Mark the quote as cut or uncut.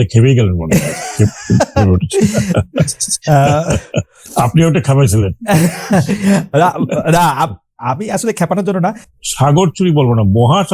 cut